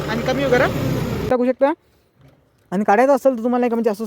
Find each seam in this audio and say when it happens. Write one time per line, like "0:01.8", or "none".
0:01.3